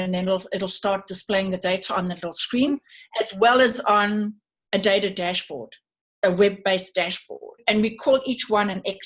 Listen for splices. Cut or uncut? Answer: cut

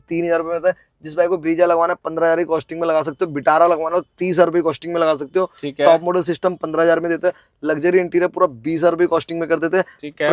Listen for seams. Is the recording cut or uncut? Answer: uncut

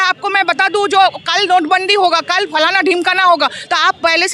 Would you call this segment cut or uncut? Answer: uncut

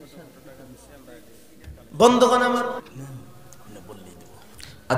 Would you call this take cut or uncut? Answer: cut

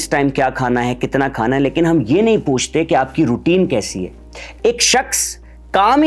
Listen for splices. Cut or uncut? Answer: uncut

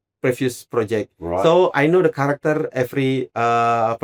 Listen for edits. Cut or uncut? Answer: uncut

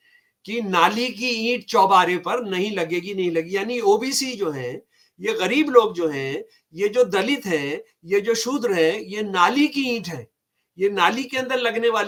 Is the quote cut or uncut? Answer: uncut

